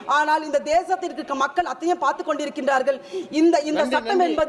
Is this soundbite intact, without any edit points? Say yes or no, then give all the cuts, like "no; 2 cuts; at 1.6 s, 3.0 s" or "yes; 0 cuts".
yes; 0 cuts